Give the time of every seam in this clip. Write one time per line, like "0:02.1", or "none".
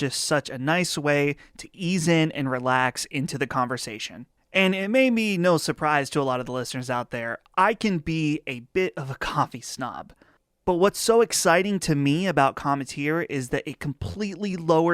0:10.5